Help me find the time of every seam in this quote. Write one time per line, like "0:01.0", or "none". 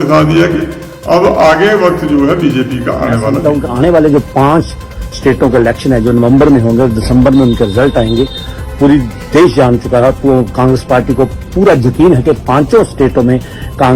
0:03.3